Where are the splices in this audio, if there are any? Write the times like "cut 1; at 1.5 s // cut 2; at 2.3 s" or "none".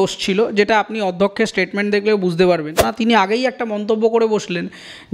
cut 1; at 2.9 s